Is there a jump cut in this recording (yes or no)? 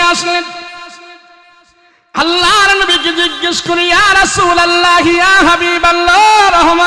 no